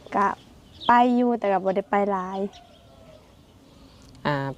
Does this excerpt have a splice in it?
no; 0 cuts

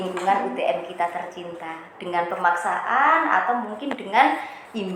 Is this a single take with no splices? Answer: yes; 0 cuts

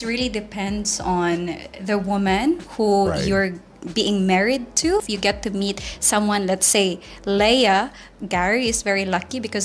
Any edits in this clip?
no; 0 cuts

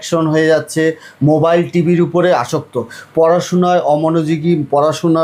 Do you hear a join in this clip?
no; 0 cuts

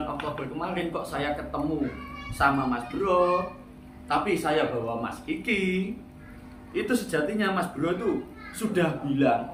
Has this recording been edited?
no; 0 cuts

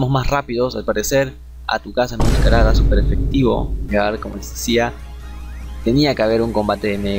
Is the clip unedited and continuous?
no; 1 cut; at 3.9 s

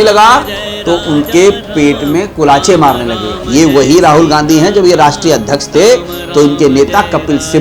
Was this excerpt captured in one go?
no; 1 cut; at 3.3 s

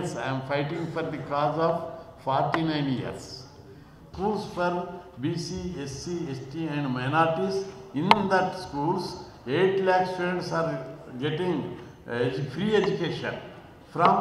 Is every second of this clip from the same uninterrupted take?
no; 1 cut; at 4.1 s

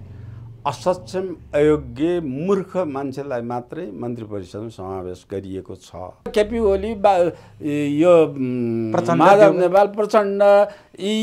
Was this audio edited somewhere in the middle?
yes; 1 cut; at 6.3 s

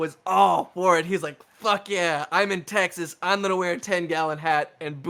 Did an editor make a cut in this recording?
no; 0 cuts

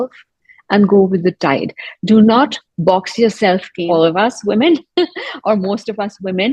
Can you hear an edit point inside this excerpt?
yes; 1 cut; at 3.7 s

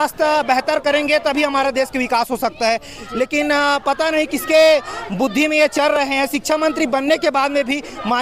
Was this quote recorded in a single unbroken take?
yes; 0 cuts

